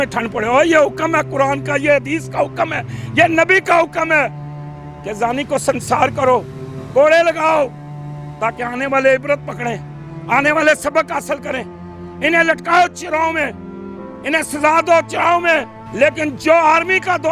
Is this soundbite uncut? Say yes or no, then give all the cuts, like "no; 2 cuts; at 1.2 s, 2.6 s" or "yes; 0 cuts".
no; 1 cut; at 15.8 s